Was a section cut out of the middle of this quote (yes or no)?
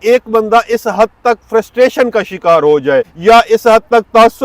yes